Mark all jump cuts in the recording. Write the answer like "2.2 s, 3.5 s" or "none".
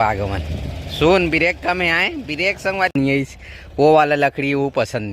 2.9 s